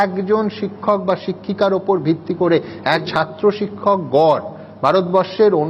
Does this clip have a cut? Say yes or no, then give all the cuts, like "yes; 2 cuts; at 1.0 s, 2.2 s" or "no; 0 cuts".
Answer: yes; 1 cut; at 3.1 s